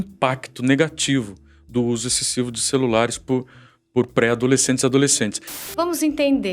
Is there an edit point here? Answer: yes; 1 cut; at 5.5 s

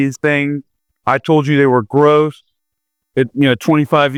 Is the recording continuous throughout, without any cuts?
yes; 0 cuts

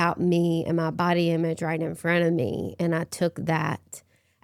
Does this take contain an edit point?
no; 0 cuts

